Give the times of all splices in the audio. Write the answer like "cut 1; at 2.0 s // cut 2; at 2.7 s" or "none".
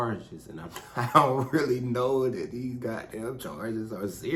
none